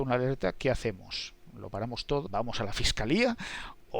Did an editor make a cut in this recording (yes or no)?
yes